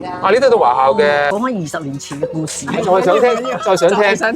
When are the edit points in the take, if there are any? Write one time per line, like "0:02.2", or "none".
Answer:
0:01.3

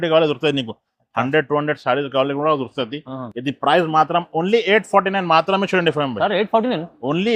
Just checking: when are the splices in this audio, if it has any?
none

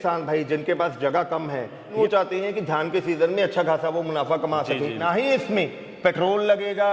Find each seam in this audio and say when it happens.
0:01.9
0:05.0

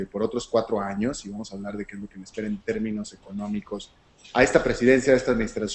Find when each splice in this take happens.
none

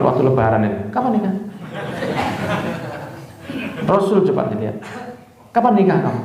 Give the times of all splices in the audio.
none

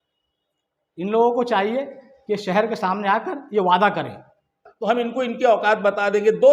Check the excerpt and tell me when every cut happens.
0:04.7

